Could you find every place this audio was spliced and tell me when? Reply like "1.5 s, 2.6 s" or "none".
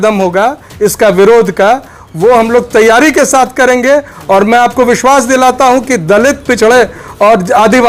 none